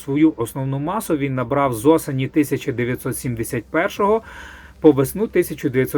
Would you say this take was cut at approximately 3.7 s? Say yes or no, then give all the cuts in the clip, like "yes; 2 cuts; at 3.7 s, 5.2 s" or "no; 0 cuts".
no; 0 cuts